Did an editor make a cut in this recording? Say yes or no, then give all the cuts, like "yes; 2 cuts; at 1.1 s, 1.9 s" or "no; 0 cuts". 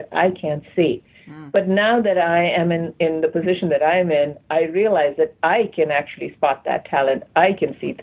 no; 0 cuts